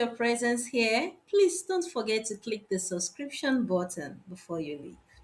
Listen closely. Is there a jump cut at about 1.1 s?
no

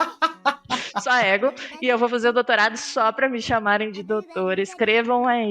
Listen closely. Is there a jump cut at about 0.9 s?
yes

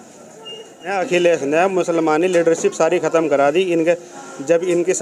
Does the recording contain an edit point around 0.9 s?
yes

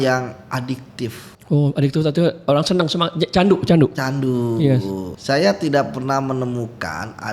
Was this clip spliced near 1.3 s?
yes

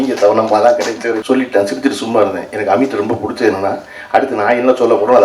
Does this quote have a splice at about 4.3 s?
no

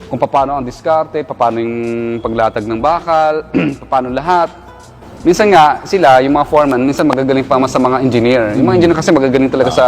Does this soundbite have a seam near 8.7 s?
yes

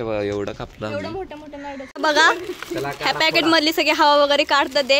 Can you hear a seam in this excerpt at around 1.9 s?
yes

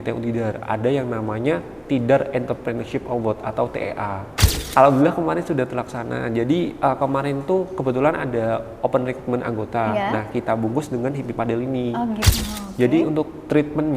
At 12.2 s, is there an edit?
yes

